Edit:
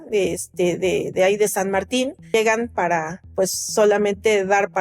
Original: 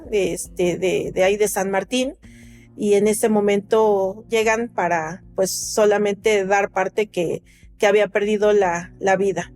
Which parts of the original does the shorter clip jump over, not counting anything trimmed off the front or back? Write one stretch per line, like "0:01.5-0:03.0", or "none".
0:02.2-0:04.2